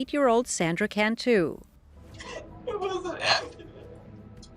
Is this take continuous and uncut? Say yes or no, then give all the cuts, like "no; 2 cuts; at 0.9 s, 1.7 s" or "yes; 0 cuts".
no; 1 cut; at 1.8 s